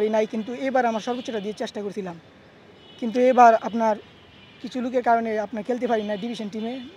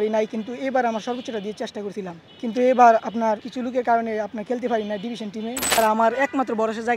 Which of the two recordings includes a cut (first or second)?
second